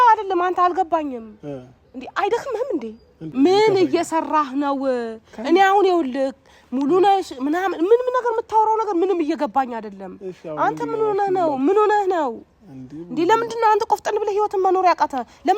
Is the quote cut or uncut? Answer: cut